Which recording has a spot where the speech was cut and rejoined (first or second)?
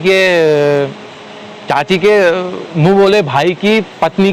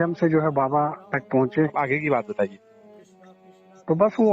second